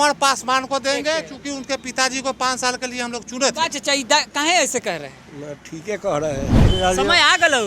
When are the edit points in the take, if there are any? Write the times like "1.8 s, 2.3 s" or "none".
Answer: 6.7 s